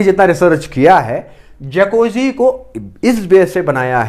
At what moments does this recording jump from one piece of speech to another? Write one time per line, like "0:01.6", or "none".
none